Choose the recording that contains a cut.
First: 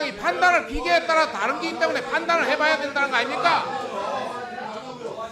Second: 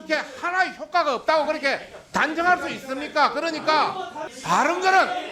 second; 1 cut; at 4.3 s

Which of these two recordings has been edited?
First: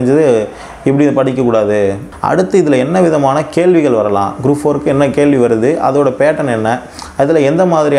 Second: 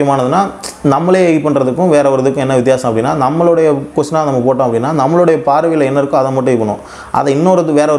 first; 1 cut; at 2.0 s

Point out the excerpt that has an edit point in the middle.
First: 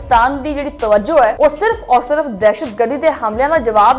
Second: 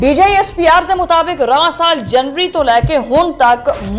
first; 1 cut; at 1.3 s

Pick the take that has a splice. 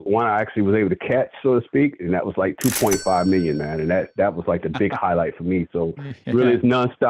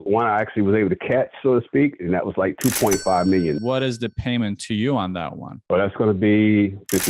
second; 1 cut; at 3.6 s

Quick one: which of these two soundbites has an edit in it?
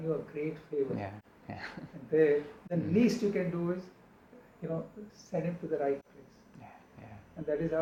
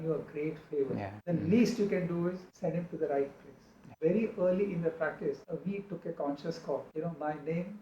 second; 5 cuts; at 1.1 s, 2.5 s, 3.9 s, 5.4 s, 6.9 s

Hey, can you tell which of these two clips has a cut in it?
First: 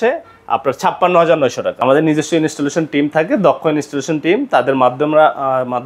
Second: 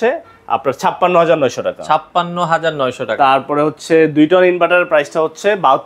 first; 1 cut; at 1.8 s

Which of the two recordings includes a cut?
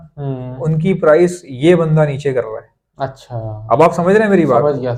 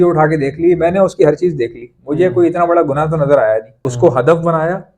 second; 1 cut; at 3.8 s

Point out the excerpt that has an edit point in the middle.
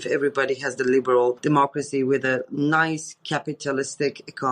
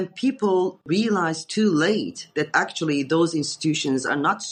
first; 1 cut; at 1.4 s

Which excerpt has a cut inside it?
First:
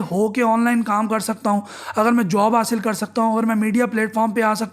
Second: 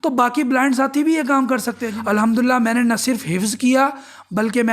second; 1 cut; at 1.8 s

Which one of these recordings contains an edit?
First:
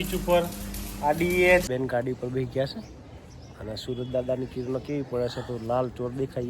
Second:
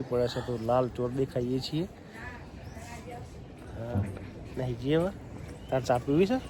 first; 1 cut; at 1.7 s

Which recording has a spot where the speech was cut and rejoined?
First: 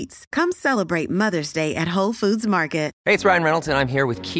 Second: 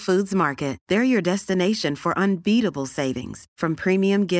first; 1 cut; at 2.9 s

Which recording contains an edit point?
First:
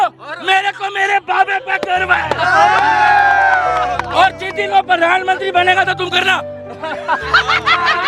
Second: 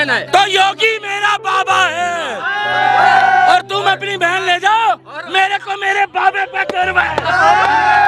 second; 1 cut; at 3.6 s

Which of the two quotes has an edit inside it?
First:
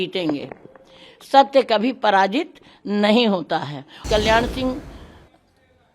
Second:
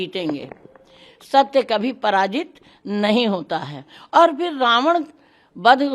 first; 1 cut; at 4.0 s

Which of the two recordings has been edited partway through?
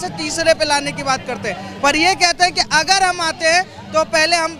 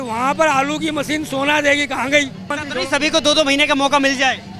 second; 1 cut; at 2.6 s

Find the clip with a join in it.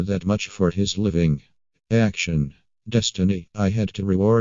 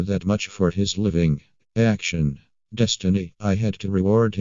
second; 1 cut; at 1.5 s

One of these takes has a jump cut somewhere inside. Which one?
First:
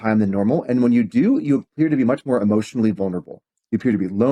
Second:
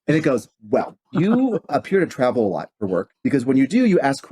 second; 3 cuts; at 1.0 s, 1.7 s, 3.1 s

